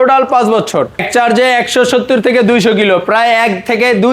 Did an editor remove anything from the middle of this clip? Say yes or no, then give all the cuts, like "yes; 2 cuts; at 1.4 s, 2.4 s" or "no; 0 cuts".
yes; 1 cut; at 1.0 s